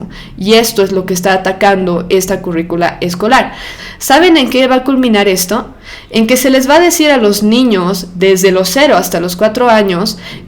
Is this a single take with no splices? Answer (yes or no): no